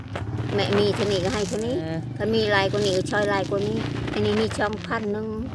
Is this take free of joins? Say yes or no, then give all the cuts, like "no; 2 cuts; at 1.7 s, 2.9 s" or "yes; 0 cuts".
no; 1 cut; at 2.0 s